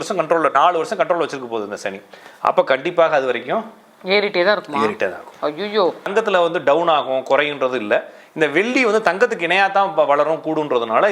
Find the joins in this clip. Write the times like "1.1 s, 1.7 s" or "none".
6.1 s